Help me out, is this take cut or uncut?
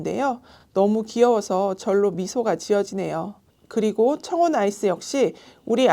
cut